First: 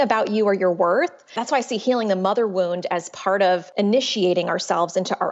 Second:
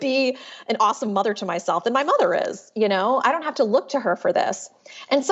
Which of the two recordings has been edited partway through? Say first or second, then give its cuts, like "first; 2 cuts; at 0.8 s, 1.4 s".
first; 2 cuts; at 1.2 s, 3.7 s